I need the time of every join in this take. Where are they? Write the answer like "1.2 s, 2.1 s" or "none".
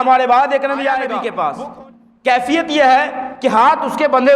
1.2 s